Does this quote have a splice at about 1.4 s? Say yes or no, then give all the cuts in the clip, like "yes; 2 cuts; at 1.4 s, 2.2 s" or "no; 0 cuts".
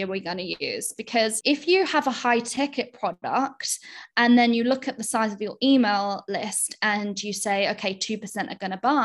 yes; 1 cut; at 1.4 s